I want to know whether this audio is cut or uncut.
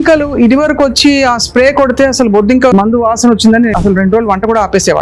cut